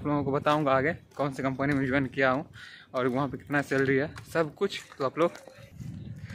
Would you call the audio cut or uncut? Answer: uncut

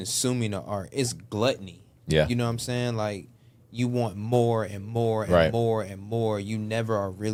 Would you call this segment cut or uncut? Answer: uncut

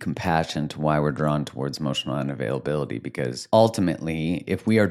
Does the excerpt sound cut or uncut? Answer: cut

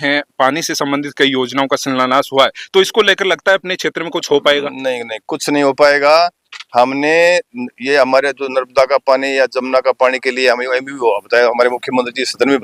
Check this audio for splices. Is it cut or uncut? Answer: uncut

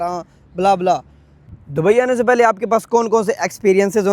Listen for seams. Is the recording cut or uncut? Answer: cut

